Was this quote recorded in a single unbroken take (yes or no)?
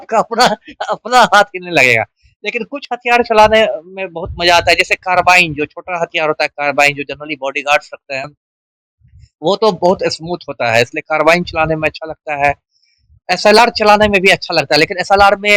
yes